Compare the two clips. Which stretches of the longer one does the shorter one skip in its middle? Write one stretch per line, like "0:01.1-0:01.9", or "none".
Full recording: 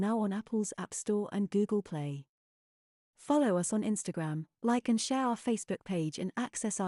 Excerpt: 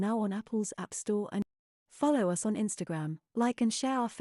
0:01.4-0:02.7